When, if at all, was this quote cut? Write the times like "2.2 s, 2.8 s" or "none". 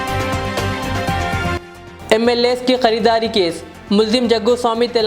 none